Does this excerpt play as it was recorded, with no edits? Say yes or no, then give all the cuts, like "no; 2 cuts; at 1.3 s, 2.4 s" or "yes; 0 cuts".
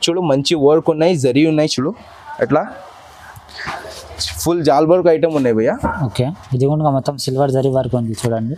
yes; 0 cuts